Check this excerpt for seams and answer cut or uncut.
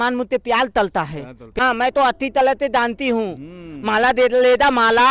cut